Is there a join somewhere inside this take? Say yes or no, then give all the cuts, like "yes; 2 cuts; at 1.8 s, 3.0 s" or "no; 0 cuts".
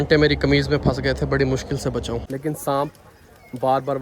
yes; 1 cut; at 2.2 s